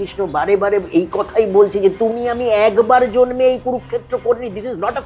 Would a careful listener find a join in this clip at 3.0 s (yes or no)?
no